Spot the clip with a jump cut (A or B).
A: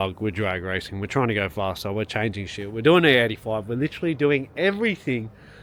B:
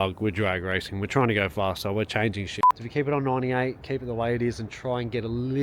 B